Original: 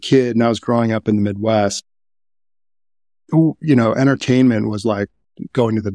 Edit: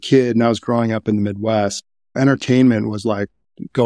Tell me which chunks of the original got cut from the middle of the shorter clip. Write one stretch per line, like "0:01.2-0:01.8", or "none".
0:02.2-0:04.0